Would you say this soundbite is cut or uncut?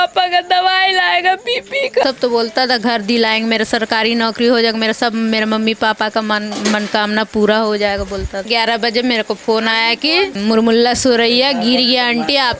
cut